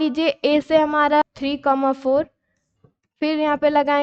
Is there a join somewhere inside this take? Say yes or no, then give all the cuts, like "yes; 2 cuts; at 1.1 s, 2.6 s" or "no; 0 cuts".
yes; 1 cut; at 1.2 s